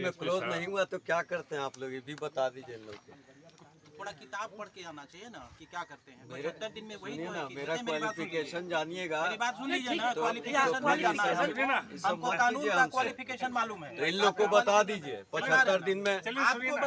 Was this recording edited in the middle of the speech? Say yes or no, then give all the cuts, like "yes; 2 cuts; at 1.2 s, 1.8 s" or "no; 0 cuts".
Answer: no; 0 cuts